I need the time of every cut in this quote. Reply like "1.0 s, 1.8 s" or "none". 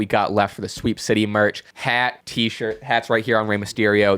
2.0 s